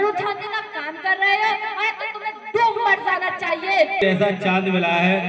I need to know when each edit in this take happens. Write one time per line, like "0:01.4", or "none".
0:04.0

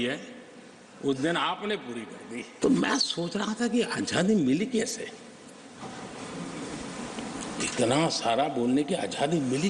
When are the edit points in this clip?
0:02.5

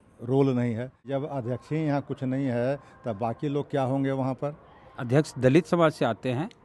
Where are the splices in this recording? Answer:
0:01.1

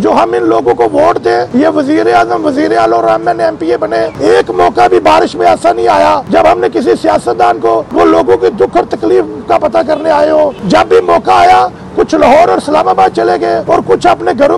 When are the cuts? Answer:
0:01.5
0:04.1
0:06.2
0:07.9
0:10.6
0:13.6

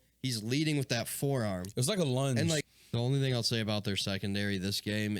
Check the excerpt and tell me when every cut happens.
0:02.7

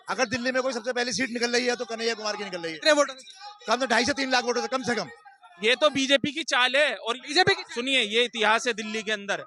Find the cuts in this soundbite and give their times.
0:05.5

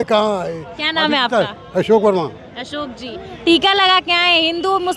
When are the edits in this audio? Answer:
none

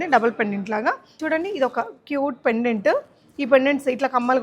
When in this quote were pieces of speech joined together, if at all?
0:01.2

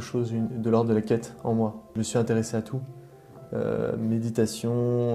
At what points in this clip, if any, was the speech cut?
0:01.9

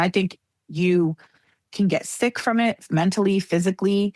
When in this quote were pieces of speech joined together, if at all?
none

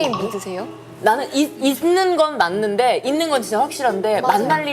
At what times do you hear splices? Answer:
0:00.9

